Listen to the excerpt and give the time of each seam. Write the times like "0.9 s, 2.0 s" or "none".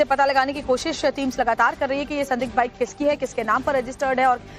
2.1 s